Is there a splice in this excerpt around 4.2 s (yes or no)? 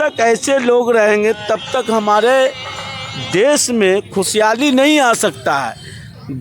no